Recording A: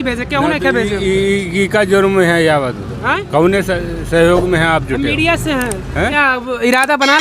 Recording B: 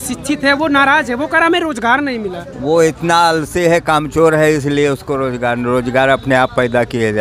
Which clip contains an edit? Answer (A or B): A